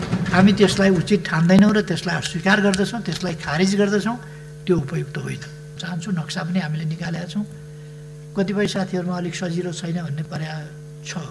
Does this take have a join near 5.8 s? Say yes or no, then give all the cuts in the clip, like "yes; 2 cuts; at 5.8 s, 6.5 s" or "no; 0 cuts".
yes; 1 cut; at 5.8 s